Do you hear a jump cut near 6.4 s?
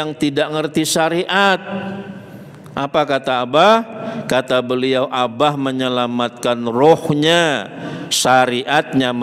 no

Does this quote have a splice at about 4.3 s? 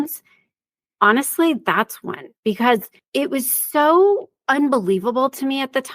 yes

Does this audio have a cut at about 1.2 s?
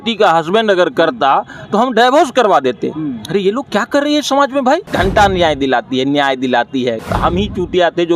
no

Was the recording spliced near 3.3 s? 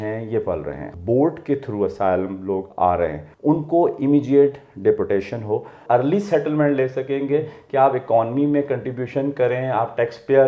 yes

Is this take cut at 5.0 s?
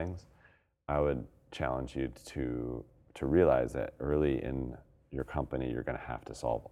no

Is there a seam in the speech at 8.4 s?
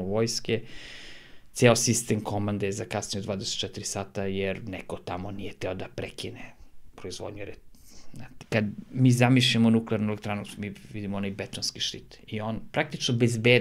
yes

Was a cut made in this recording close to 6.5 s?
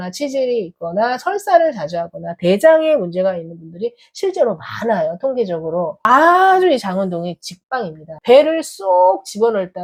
no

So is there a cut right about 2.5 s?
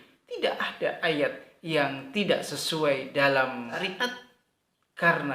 no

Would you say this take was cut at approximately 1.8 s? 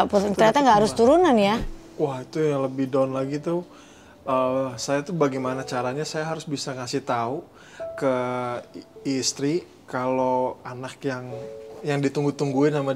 yes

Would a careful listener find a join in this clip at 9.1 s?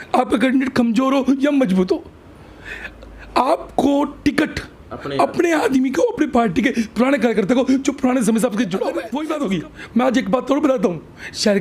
yes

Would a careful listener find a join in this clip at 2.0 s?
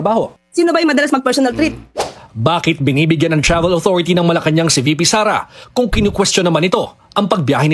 yes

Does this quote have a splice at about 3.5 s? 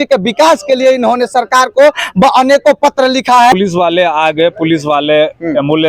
yes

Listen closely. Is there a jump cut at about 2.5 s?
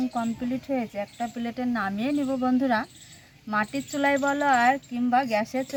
no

